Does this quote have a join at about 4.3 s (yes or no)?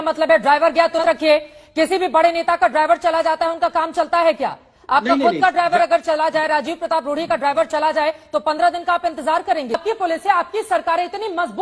no